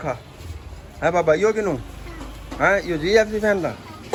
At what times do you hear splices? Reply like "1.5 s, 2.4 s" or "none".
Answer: none